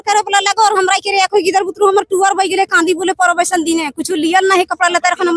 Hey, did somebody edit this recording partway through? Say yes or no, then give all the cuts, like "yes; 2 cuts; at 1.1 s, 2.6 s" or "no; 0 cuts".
no; 0 cuts